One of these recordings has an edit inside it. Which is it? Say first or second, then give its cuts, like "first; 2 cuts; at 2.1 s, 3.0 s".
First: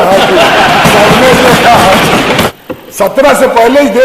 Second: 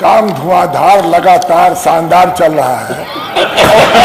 first; 1 cut; at 2.5 s